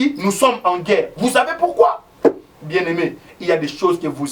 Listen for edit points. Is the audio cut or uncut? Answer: uncut